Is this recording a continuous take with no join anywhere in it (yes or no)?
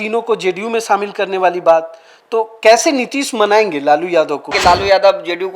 no